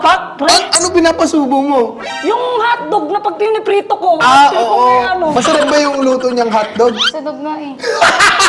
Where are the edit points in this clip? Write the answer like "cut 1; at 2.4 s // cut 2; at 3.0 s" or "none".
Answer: cut 1; at 5.3 s